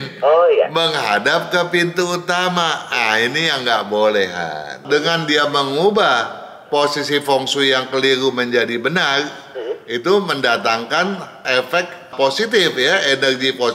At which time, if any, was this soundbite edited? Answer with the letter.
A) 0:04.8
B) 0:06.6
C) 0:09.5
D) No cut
A